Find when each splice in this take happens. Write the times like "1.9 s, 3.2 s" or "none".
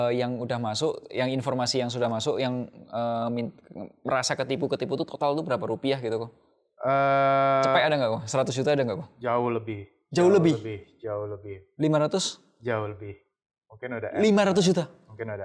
none